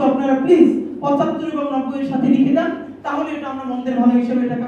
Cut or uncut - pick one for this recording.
uncut